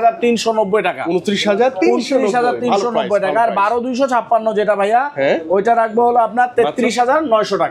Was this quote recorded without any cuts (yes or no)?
yes